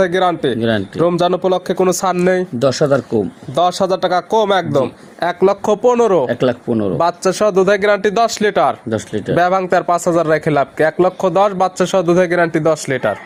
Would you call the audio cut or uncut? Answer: uncut